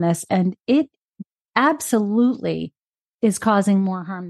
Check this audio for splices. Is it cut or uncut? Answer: uncut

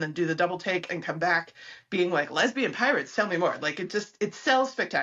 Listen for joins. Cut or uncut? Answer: uncut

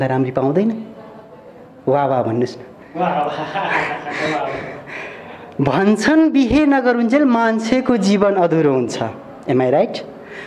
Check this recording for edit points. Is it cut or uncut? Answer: uncut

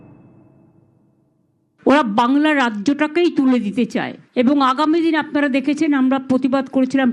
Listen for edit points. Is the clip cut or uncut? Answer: cut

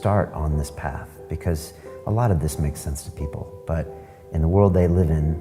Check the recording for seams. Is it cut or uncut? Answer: uncut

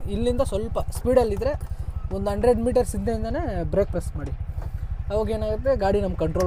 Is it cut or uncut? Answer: uncut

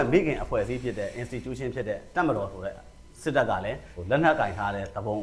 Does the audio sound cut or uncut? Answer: uncut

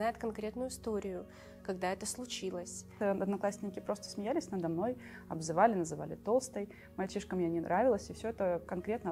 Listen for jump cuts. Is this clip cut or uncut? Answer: cut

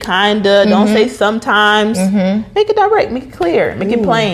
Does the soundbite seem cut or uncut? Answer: uncut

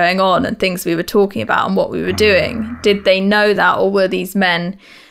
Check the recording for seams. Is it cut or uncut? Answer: uncut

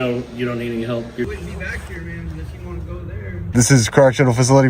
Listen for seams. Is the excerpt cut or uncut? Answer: cut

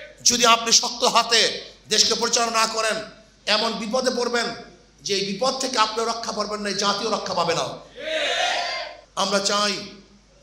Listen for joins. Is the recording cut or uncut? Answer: cut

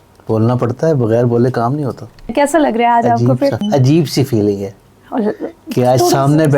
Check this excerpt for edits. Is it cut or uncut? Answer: cut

